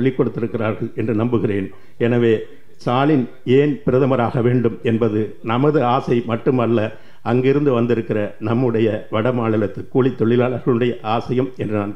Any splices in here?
no; 0 cuts

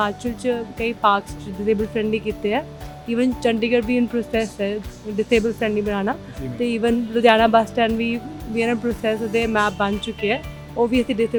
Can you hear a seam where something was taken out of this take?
no; 0 cuts

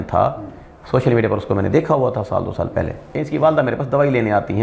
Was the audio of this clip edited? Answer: yes; 1 cut; at 3.1 s

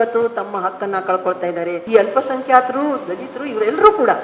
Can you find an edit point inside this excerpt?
yes; 1 cut; at 1.8 s

